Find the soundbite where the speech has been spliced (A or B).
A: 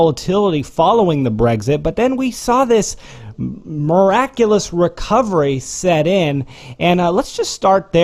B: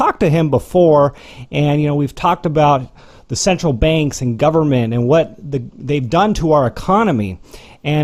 A